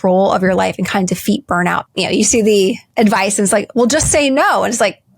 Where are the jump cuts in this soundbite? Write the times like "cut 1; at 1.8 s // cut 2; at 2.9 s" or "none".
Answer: cut 1; at 1.8 s // cut 2; at 2.8 s